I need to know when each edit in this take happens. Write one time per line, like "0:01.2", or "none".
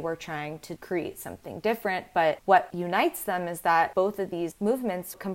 none